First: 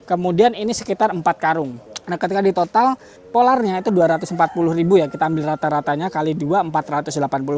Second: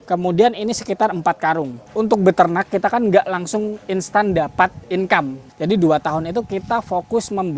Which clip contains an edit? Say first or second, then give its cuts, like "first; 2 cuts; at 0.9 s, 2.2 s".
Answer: second; 2 cuts; at 1.8 s, 5.4 s